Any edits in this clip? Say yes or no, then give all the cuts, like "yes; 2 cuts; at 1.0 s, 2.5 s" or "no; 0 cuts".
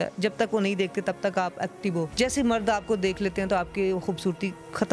yes; 1 cut; at 2.1 s